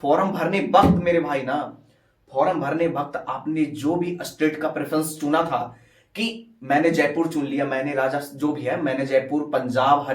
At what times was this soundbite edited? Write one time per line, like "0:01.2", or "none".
0:06.0